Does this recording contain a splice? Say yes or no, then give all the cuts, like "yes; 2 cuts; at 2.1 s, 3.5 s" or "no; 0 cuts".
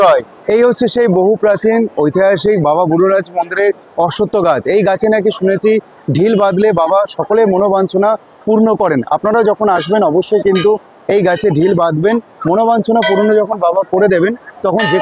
no; 0 cuts